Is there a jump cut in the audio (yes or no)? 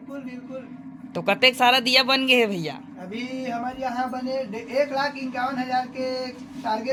no